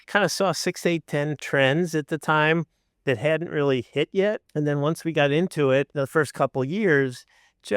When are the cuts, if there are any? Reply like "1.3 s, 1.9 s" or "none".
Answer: 1.4 s, 4.4 s, 5.9 s